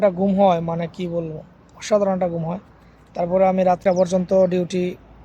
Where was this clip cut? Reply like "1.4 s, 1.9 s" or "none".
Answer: 3.8 s